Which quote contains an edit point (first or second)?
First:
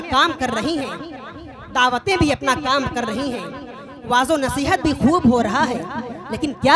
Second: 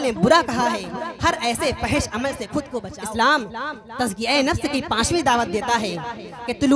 second